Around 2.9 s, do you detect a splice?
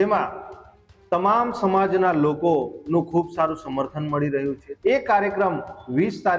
no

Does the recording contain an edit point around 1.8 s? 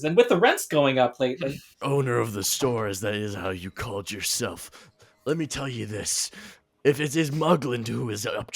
yes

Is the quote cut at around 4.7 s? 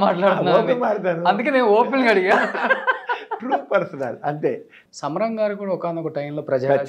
yes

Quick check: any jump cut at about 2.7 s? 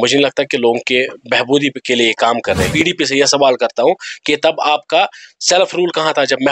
yes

